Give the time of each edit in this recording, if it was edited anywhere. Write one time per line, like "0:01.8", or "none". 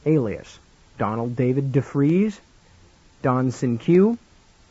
0:02.5